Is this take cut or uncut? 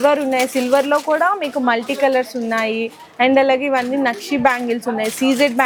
uncut